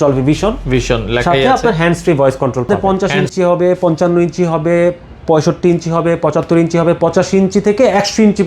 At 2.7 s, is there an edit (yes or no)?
yes